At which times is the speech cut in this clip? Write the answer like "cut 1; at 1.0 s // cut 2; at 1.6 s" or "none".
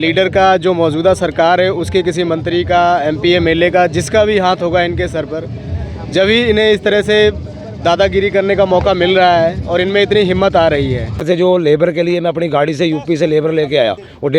cut 1; at 11.2 s